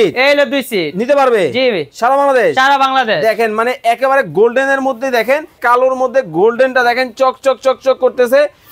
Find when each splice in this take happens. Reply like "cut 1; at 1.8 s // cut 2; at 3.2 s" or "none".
cut 1; at 5.6 s

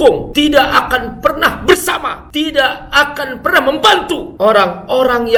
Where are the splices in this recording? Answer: none

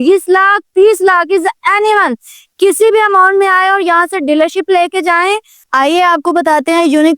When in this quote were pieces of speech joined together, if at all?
cut 1; at 5.6 s

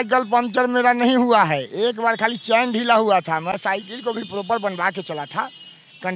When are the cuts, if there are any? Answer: none

